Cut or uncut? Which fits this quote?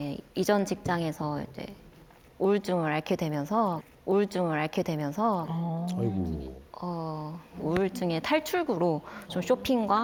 uncut